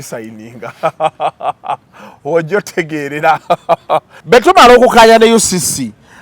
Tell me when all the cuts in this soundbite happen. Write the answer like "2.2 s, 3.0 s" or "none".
4.1 s